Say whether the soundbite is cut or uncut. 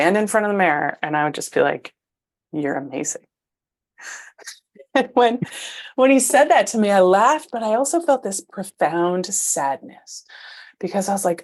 uncut